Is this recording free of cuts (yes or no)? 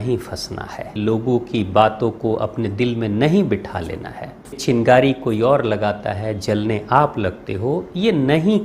no